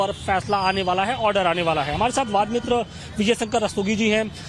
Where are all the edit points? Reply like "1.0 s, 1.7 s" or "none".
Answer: 3.0 s